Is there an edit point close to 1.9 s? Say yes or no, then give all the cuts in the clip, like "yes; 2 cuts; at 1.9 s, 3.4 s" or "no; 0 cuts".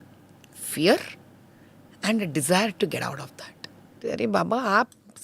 no; 1 cut; at 4.0 s